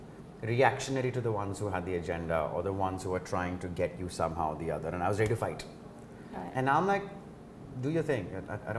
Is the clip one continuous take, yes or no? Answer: yes